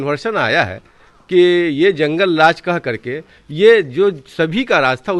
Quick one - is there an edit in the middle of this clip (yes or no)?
no